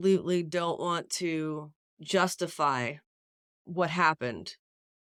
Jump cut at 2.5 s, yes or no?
no